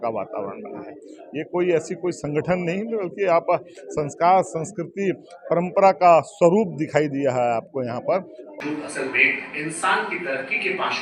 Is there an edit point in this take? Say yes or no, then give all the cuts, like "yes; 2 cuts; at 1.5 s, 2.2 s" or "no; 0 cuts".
yes; 1 cut; at 8.5 s